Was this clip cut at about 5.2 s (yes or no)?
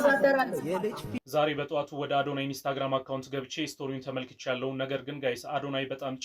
no